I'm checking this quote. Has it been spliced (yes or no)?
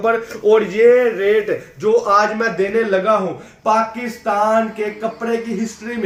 no